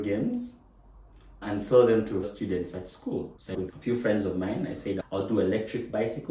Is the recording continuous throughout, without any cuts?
no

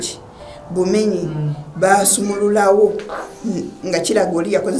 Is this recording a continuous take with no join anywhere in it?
yes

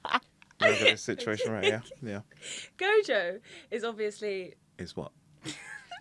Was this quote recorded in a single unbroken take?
no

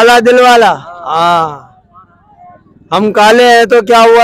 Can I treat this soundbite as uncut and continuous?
yes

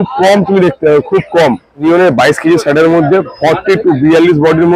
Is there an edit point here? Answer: yes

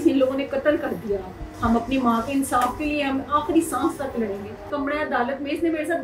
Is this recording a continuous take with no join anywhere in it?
no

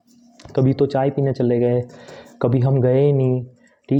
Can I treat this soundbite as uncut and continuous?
yes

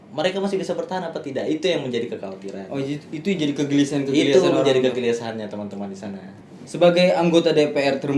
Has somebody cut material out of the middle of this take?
yes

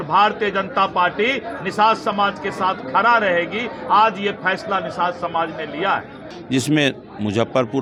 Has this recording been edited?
no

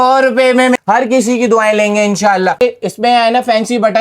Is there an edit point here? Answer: yes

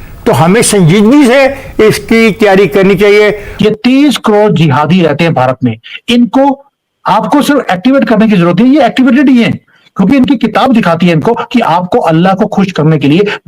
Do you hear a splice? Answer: yes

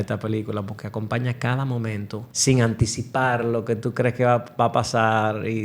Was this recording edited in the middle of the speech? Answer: yes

